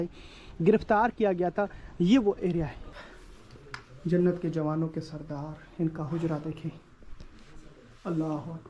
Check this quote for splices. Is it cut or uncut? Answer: cut